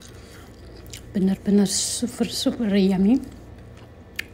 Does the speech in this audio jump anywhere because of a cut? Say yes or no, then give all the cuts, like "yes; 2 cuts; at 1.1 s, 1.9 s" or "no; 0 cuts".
no; 0 cuts